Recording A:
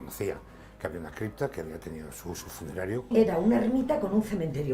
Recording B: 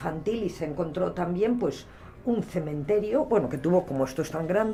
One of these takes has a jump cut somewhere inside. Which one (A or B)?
A